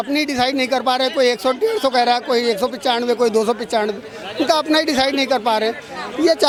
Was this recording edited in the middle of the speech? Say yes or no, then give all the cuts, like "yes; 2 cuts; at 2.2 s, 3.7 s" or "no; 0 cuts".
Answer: no; 0 cuts